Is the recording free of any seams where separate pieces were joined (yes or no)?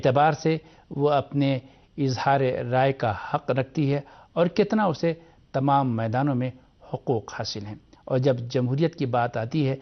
no